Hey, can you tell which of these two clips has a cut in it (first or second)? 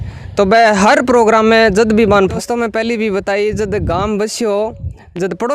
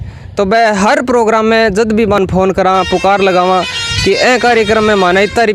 first